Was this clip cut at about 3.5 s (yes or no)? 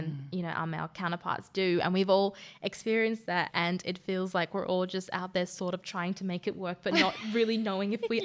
yes